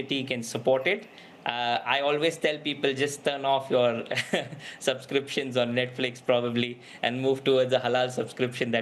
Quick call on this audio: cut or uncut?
uncut